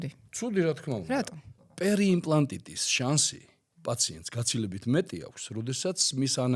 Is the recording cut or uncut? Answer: cut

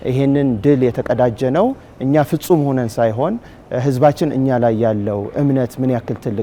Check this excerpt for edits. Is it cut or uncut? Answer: uncut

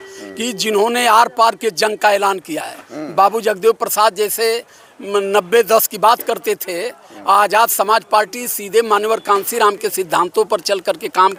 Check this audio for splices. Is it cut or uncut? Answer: uncut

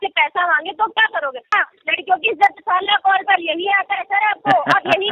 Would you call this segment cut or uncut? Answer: cut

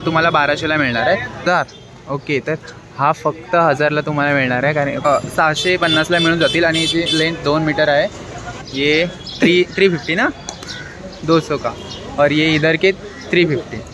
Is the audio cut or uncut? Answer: cut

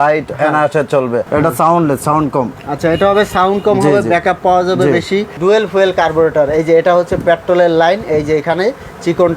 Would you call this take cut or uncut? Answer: cut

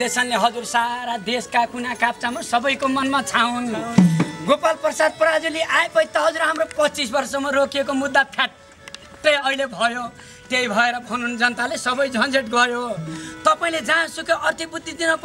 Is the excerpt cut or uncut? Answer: uncut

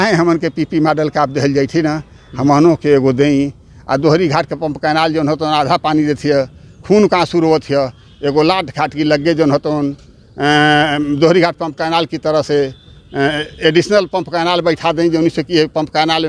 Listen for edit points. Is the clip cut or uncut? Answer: uncut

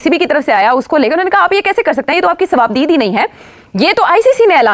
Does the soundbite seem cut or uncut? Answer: uncut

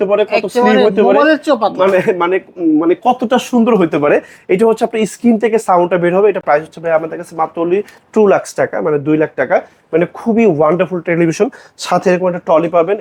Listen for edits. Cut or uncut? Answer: uncut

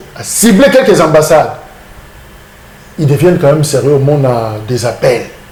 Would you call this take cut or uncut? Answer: uncut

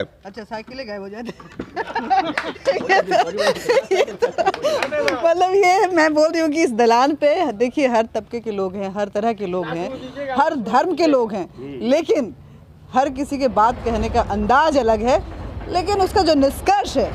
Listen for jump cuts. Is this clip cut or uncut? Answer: uncut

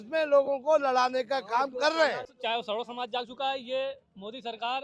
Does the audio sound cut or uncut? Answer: cut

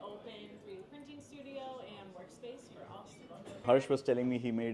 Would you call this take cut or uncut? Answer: cut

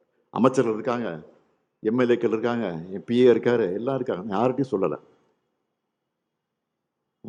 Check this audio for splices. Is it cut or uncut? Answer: uncut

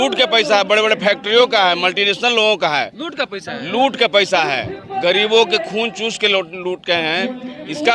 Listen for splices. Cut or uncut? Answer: uncut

